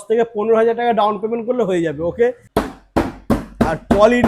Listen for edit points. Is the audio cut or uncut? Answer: cut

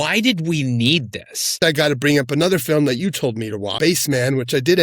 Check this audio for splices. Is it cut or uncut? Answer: cut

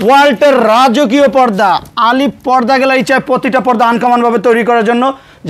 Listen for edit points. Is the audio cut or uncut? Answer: uncut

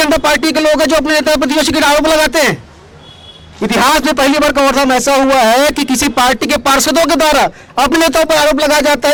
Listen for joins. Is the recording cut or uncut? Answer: uncut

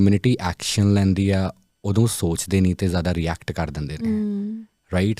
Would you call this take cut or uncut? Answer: uncut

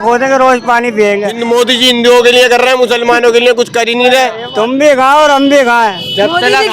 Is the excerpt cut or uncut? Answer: cut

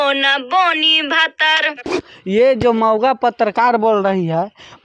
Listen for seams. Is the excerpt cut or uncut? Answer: uncut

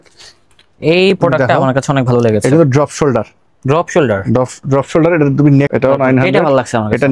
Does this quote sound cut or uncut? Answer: cut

